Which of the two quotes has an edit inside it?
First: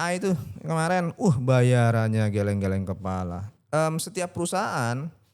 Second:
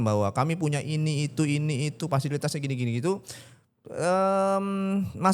first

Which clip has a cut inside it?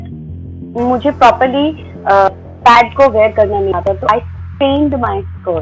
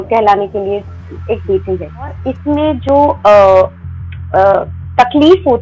second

